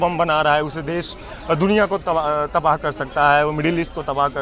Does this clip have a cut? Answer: no; 0 cuts

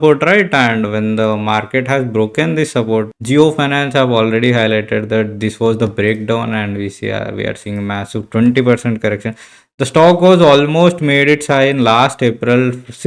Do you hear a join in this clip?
yes; 1 cut; at 3.2 s

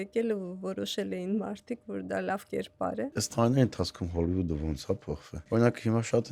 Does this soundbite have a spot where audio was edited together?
yes; 2 cuts; at 3.1 s, 5.3 s

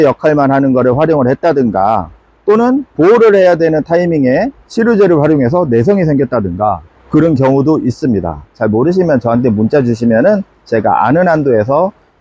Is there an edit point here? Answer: no; 0 cuts

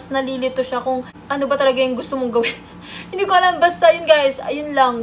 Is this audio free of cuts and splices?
yes; 0 cuts

